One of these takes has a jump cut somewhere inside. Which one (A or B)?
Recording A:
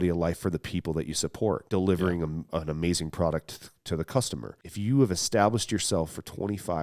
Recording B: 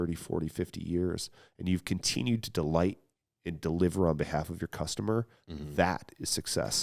A